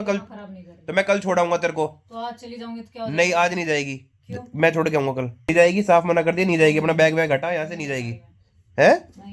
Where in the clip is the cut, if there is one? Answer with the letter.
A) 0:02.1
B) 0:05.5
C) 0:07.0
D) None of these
B